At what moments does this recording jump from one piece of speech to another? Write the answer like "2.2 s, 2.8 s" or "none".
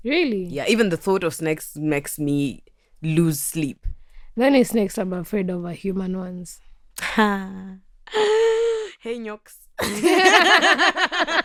none